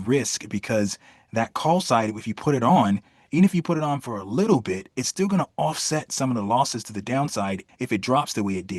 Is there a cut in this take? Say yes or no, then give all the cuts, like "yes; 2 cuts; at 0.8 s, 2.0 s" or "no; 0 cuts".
yes; 1 cut; at 7.6 s